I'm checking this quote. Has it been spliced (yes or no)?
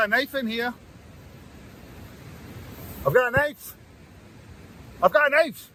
no